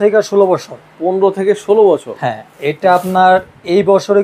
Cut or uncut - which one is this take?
uncut